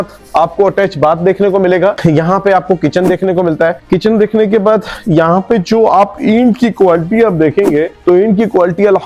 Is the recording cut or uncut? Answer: uncut